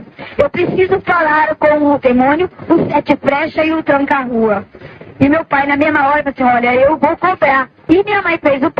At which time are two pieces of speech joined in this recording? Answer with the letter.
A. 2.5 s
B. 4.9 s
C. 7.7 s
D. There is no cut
C